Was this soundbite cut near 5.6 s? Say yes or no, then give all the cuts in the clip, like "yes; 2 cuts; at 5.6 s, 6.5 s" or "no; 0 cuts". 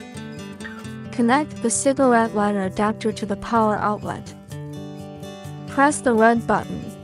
yes; 3 cuts; at 1.0 s, 4.3 s, 5.6 s